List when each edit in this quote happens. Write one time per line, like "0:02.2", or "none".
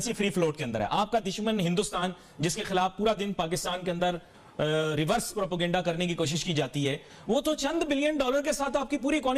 none

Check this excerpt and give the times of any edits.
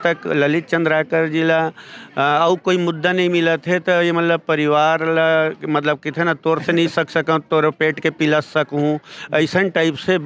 none

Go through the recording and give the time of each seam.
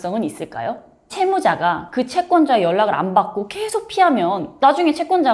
0:01.1

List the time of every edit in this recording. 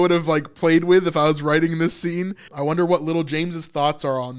0:02.5

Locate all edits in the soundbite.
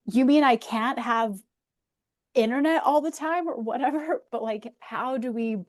none

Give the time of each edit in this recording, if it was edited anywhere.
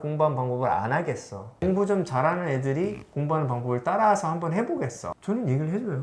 0:05.0

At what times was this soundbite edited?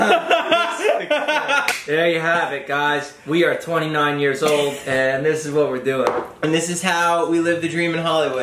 none

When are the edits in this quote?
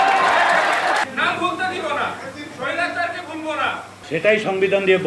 0:01.0
0:03.9

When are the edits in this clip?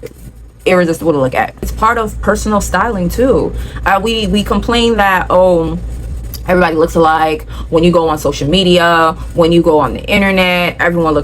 0:01.7

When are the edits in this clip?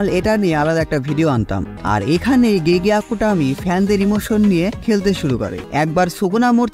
0:01.7
0:05.6

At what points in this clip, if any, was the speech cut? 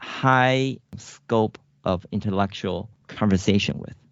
0:00.9

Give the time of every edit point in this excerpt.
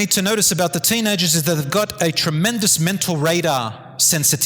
none

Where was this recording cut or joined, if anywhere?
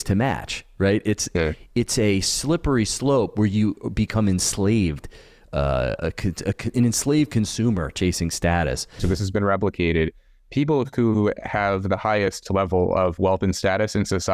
0:09.0

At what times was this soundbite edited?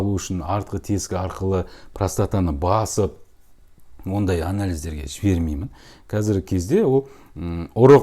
0:06.0

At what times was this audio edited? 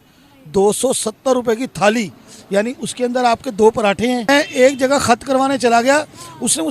0:04.3

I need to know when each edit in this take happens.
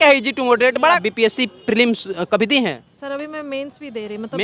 0:01.0

